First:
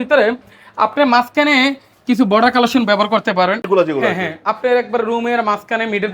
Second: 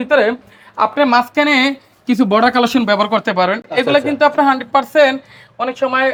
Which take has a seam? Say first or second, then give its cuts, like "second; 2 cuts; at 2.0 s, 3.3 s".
first; 1 cut; at 3.6 s